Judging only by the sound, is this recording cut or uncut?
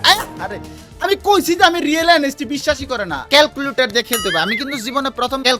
cut